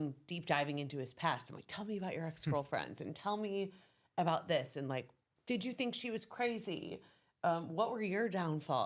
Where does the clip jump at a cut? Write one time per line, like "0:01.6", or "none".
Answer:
none

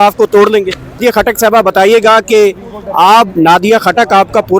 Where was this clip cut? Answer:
0:01.0

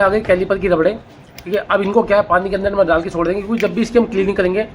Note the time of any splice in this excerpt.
none

